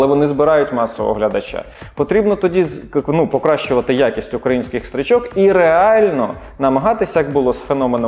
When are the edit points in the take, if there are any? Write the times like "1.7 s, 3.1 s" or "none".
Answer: none